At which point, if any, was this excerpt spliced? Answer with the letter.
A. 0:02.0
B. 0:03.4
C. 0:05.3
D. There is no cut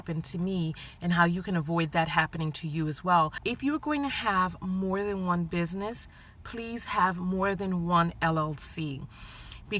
B